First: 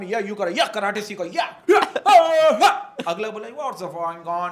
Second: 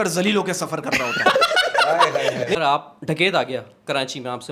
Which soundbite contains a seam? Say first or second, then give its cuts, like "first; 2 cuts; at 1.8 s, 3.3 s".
second; 1 cut; at 2.6 s